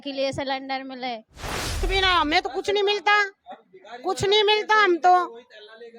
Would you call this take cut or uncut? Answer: cut